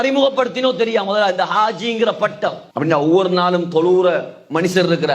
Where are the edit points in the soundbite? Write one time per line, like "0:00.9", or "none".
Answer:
0:02.6